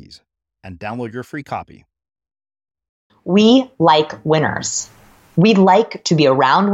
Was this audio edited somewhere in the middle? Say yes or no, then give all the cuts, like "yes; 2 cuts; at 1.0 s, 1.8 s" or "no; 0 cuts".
yes; 1 cut; at 3.1 s